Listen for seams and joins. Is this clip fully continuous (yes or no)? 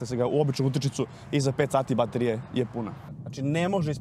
no